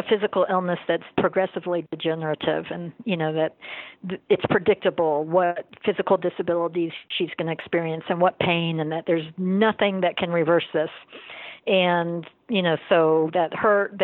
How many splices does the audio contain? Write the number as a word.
two